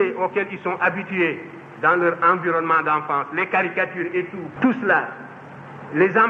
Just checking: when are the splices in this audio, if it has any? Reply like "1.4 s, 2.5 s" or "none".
4.4 s